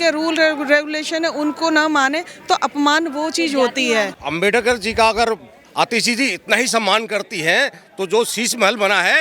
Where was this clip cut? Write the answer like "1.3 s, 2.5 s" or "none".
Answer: 4.2 s